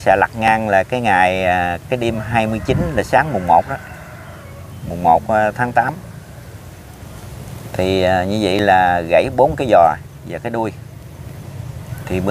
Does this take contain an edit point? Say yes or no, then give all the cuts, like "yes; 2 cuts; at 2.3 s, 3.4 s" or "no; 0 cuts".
no; 0 cuts